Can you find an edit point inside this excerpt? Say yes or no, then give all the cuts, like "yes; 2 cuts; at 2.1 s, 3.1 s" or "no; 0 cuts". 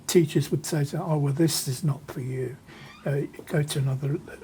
no; 0 cuts